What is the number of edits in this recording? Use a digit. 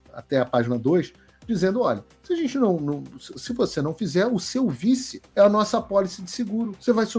1